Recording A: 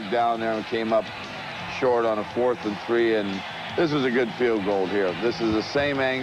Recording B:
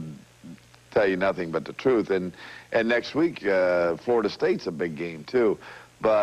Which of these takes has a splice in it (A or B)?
B